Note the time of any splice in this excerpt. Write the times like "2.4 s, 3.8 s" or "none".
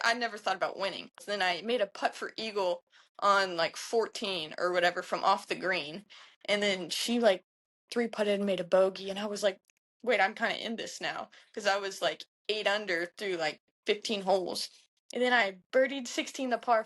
1.2 s